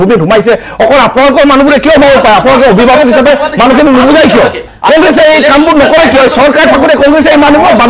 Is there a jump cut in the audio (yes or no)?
yes